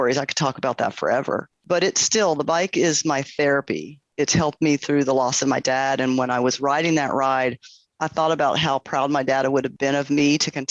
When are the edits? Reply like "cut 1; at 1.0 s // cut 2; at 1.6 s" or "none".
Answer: cut 1; at 1.5 s // cut 2; at 4.1 s // cut 3; at 9.7 s